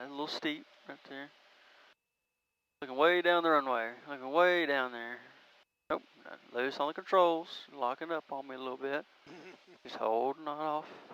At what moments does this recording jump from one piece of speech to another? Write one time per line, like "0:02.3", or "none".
none